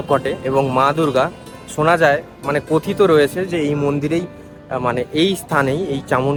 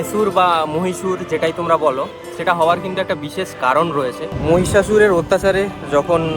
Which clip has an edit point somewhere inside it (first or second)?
second